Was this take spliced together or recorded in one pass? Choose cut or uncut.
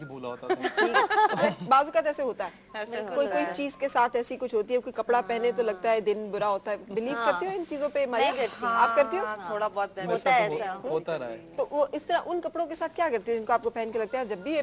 cut